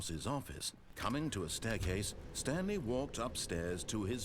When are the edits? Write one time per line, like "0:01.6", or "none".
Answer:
0:00.9